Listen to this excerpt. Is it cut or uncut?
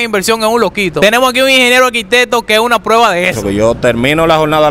cut